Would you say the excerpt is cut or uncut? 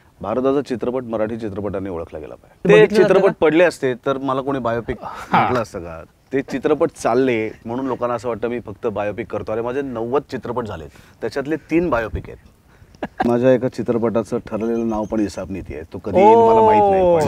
cut